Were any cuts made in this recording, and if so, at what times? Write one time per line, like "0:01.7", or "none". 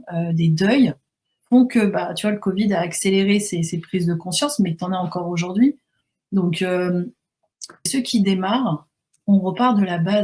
0:07.9